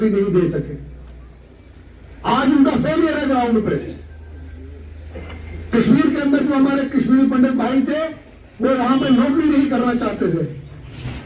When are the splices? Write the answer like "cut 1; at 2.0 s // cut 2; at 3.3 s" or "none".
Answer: none